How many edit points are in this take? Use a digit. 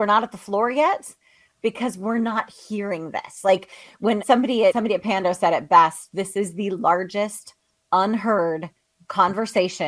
0